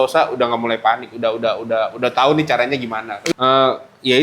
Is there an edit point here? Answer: yes; 1 cut; at 3.1 s

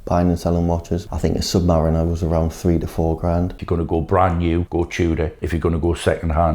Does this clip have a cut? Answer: yes; 4 cuts; at 1.0 s, 3.6 s, 4.7 s, 5.4 s

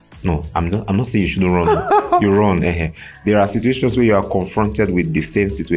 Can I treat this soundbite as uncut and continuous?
yes; 0 cuts

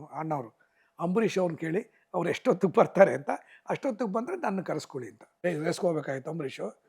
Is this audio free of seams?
no; 1 cut; at 5.3 s

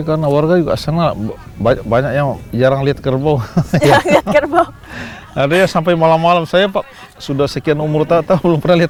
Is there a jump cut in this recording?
no; 0 cuts

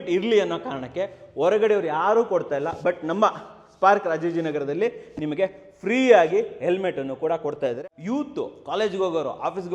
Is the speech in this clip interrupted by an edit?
yes; 1 cut; at 7.8 s

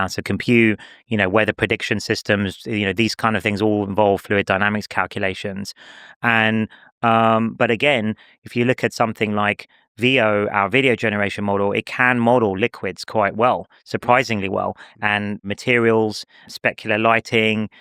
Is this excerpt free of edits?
yes; 0 cuts

